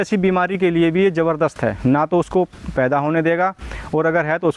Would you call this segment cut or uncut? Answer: uncut